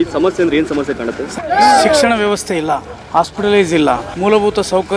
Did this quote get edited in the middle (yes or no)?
yes